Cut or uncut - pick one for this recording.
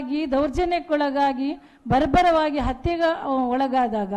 uncut